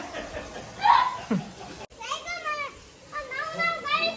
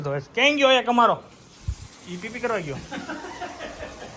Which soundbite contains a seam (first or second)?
first